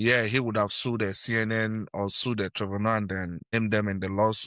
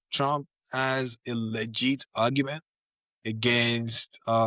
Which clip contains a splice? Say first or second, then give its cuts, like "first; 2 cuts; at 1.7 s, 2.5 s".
first; 1 cut; at 3.4 s